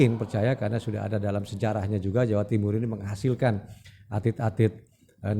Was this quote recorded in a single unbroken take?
yes; 0 cuts

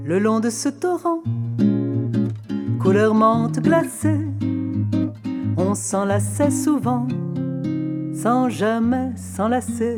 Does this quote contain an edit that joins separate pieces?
no; 0 cuts

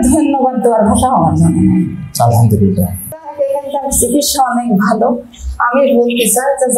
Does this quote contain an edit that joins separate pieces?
yes; 1 cut; at 3.3 s

